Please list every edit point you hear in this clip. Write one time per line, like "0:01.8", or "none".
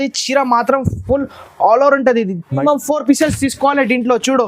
0:02.6